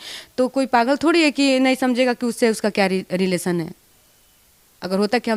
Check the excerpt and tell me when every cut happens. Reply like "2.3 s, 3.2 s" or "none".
none